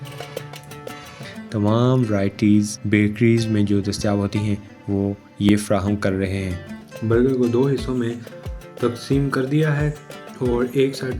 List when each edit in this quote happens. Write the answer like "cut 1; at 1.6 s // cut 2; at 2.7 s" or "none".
cut 1; at 1.2 s // cut 2; at 6.7 s